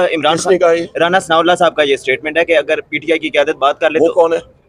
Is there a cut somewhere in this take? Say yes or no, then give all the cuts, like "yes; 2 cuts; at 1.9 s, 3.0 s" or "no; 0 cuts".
no; 0 cuts